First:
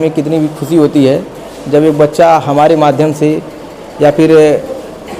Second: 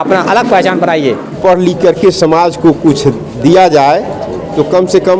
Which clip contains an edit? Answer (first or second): second